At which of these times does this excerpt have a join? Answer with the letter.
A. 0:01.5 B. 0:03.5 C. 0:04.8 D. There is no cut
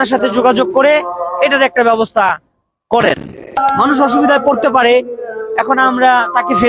B